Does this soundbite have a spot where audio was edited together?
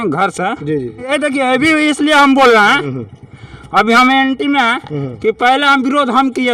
yes; 1 cut; at 1.1 s

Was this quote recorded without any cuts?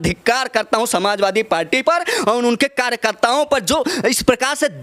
yes; 0 cuts

